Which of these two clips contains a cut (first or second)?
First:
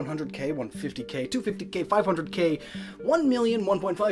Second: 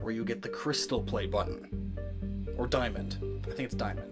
first